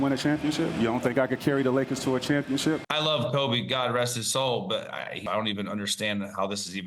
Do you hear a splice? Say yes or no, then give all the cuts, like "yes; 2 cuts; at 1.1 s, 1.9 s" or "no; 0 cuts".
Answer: yes; 2 cuts; at 2.8 s, 5.2 s